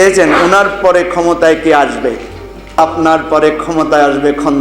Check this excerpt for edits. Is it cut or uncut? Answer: cut